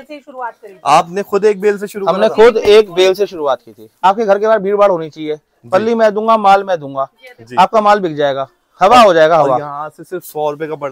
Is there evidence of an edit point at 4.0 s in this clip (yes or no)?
yes